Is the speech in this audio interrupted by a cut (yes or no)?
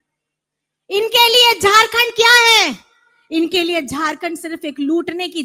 no